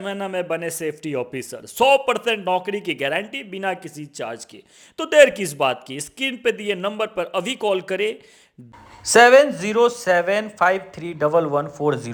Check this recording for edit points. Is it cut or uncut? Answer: uncut